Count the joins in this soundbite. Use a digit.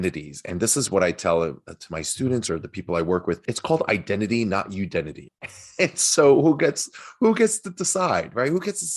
2